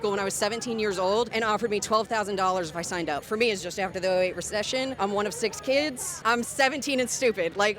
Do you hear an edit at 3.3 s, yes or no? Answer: yes